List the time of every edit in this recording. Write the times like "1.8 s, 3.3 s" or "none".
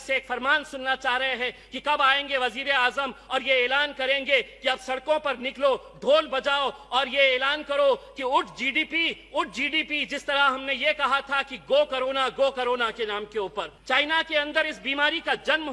13.8 s